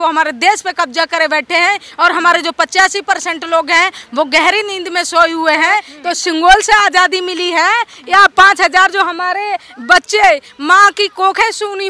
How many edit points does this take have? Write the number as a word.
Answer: one